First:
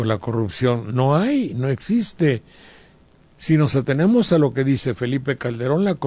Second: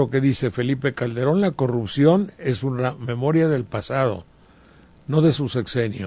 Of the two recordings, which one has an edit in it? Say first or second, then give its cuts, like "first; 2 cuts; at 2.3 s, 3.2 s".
first; 1 cut; at 2.5 s